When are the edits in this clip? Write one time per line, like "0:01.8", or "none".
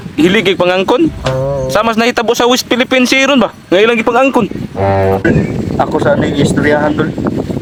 none